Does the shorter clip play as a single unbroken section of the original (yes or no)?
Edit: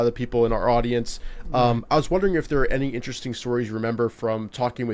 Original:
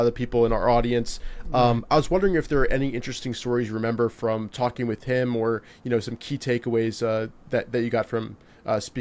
yes